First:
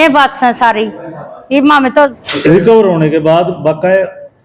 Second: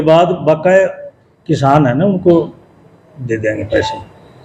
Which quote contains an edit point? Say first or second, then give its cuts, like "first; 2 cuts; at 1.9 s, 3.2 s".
first; 1 cut; at 2.2 s